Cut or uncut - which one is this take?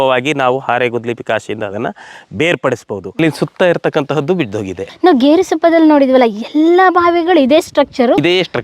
cut